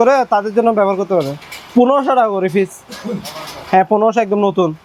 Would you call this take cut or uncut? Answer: uncut